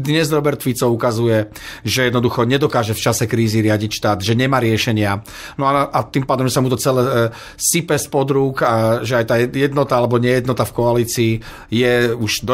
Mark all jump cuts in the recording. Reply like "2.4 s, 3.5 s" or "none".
none